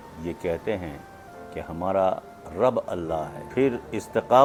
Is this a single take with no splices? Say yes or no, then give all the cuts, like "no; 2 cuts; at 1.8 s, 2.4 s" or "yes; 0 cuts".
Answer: yes; 0 cuts